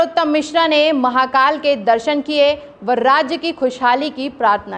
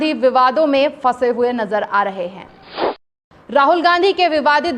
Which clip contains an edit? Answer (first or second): second